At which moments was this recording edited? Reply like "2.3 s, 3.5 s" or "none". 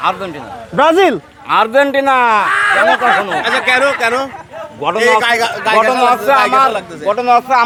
none